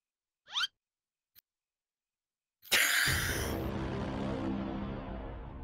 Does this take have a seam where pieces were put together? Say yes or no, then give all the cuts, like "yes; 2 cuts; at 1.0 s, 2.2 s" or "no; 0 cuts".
no; 0 cuts